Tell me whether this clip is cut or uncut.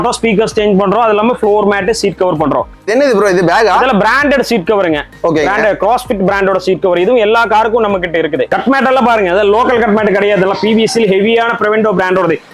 cut